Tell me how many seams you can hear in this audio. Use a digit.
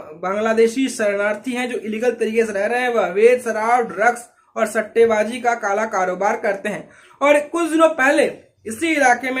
0